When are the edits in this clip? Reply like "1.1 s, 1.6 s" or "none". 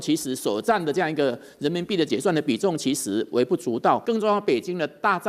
2.1 s, 4.0 s